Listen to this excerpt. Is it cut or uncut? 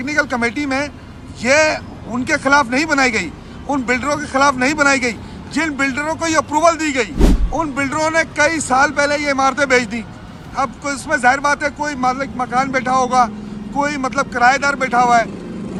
uncut